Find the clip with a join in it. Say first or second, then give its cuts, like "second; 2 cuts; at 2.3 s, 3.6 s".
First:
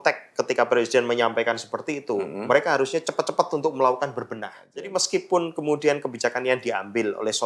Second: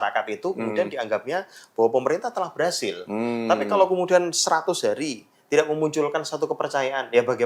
first; 1 cut; at 4.9 s